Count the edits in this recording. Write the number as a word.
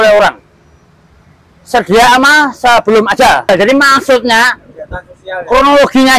one